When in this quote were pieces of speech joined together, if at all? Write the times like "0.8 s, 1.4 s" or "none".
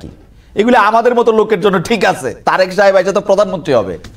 none